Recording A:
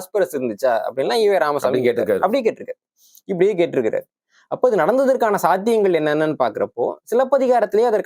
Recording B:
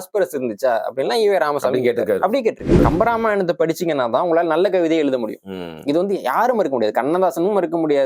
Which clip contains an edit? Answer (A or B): B